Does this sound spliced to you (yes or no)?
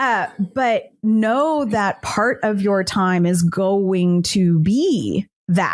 no